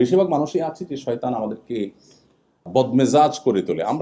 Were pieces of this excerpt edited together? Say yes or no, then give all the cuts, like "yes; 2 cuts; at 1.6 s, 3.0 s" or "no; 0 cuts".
yes; 1 cut; at 2.7 s